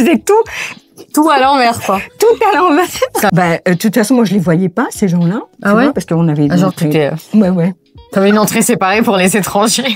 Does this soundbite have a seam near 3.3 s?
yes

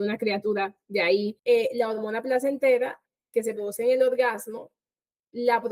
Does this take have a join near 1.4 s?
yes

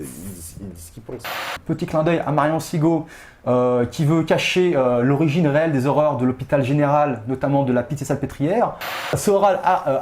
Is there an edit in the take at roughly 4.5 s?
no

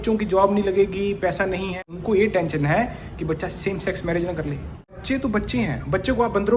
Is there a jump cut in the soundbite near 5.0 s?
yes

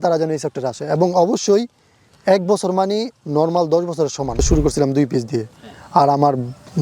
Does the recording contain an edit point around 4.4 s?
yes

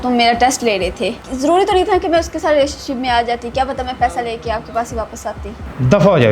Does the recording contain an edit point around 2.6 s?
no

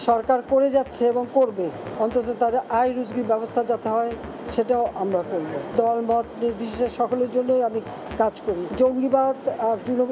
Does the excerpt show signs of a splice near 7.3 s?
no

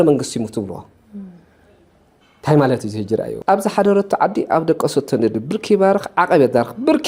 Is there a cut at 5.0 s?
no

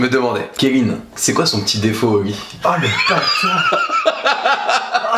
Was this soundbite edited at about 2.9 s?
no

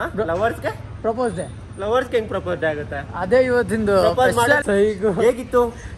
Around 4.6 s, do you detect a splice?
yes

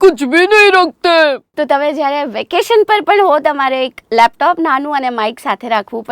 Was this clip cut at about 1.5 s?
yes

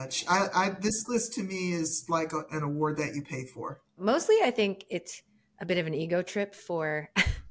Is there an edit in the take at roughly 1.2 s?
no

